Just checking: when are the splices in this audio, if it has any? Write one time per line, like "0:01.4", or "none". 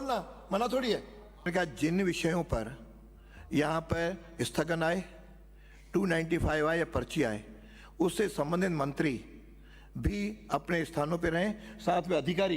0:01.5

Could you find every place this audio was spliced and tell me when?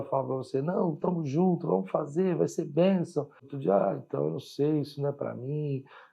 0:03.4

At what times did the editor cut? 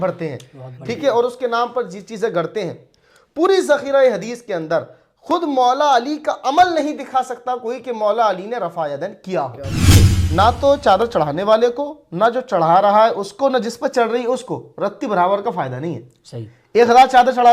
0:09.8

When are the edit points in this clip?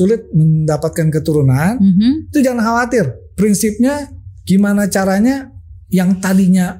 none

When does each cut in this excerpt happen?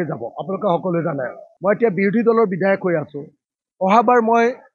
0:01.4

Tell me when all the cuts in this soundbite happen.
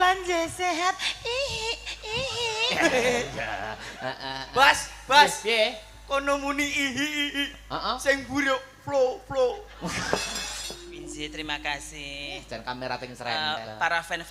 0:10.9

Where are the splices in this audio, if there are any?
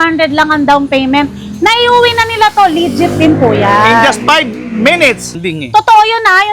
0:05.3

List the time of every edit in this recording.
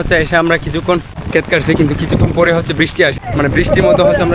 0:01.2
0:03.2

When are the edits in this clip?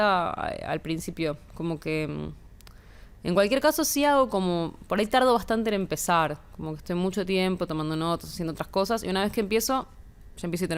none

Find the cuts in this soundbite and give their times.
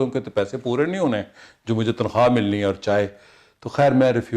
none

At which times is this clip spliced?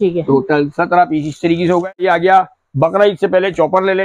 0:01.9

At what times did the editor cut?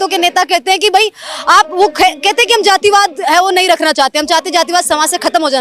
none

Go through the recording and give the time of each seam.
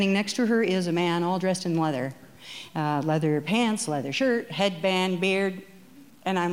none

